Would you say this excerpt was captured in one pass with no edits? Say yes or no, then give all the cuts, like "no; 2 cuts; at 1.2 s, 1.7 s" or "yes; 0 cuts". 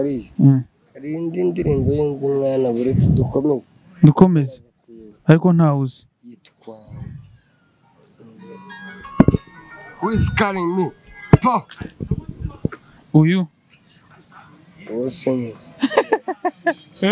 yes; 0 cuts